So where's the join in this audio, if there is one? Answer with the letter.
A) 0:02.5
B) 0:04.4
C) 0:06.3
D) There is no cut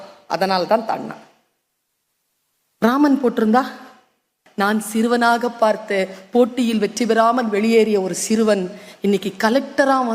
B